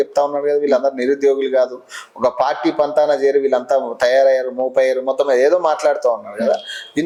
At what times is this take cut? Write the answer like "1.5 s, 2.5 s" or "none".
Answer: none